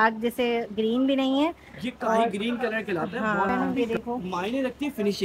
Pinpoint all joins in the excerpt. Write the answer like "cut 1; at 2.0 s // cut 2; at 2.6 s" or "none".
cut 1; at 3.5 s